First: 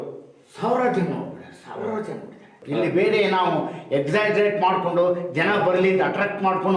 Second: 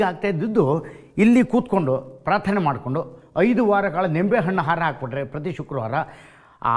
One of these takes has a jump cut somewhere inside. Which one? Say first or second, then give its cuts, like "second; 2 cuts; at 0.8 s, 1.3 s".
first; 1 cut; at 2.5 s